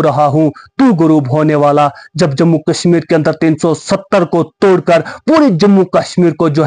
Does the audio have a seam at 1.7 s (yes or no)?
no